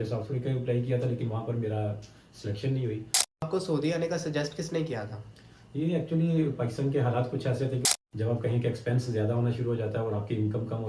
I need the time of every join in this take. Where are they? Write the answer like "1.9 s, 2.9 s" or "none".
3.4 s, 8.1 s

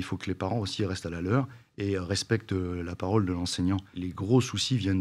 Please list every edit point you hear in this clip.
3.9 s

